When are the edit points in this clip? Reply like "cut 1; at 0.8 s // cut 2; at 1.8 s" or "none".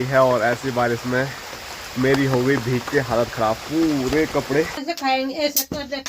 cut 1; at 4.8 s